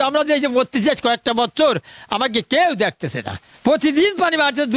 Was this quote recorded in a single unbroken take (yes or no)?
no